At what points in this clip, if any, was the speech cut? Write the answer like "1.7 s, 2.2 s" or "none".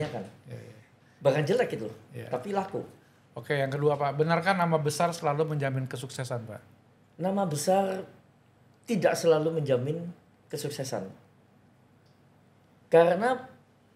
none